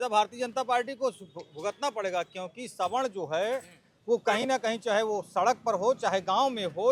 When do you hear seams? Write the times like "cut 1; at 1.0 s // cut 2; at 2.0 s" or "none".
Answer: none